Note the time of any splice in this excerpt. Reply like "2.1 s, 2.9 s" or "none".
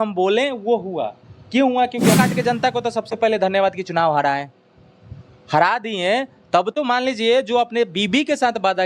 2.2 s